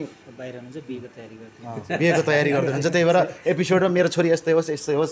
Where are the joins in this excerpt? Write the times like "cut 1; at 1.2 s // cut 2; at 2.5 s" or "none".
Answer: none